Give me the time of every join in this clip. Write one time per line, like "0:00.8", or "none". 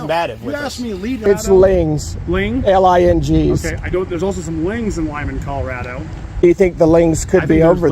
0:01.2